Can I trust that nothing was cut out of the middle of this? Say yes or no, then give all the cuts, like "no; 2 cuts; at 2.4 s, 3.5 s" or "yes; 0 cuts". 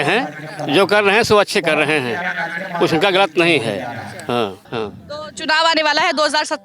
no; 1 cut; at 4.6 s